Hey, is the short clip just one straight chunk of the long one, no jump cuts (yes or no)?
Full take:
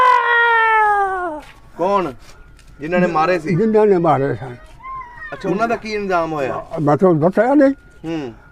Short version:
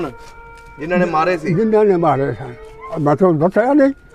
no